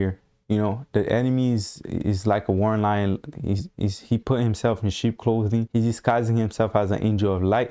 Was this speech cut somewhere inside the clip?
no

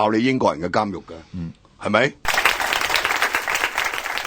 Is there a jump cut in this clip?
yes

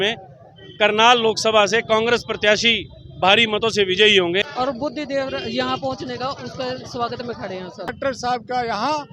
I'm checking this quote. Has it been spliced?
yes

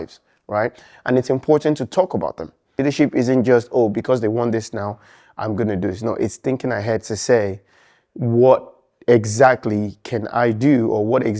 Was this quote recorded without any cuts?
no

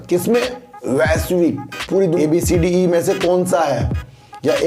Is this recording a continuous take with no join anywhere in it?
no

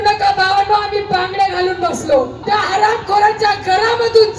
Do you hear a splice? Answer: yes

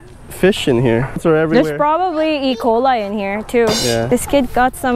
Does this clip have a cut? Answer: yes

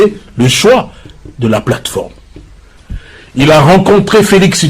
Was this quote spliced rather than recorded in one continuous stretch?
yes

